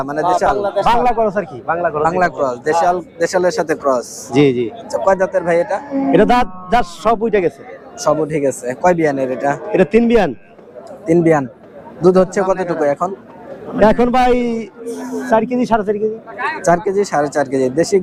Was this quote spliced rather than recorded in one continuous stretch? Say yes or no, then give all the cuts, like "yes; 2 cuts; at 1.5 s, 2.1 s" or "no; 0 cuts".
no; 0 cuts